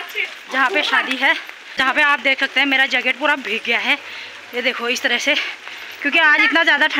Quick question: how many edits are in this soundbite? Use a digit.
1